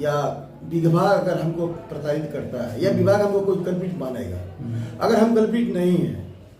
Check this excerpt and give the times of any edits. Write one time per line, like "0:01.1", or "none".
none